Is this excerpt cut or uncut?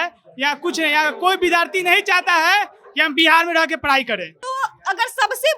cut